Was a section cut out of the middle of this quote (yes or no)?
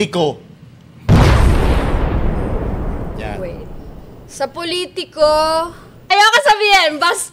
yes